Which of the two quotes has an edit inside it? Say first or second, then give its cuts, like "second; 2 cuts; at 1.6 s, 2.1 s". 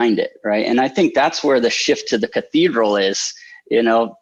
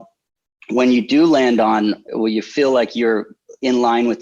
second; 1 cut; at 2.1 s